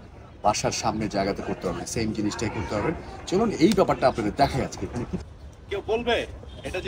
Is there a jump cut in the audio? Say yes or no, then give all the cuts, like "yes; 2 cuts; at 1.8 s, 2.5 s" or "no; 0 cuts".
yes; 1 cut; at 5.1 s